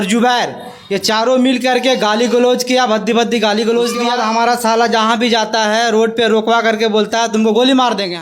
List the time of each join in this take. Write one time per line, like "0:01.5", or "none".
0:04.0